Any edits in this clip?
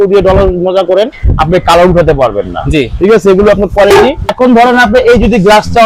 yes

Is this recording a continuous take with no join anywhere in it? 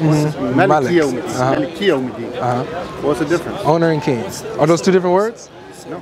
yes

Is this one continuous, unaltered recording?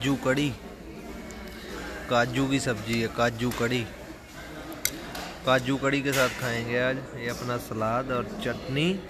yes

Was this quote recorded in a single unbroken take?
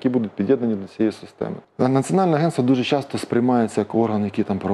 no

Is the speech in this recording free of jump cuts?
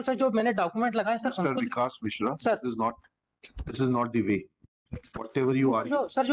yes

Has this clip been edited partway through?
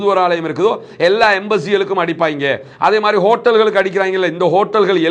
no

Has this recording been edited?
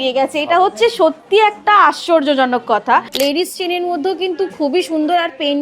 yes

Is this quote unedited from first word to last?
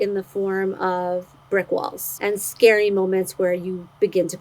no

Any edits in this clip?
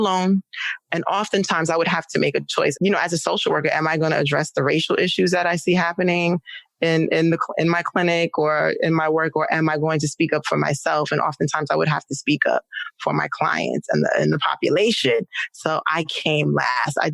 yes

